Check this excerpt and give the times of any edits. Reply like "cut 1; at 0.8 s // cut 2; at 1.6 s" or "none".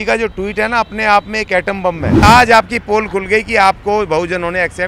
cut 1; at 2.2 s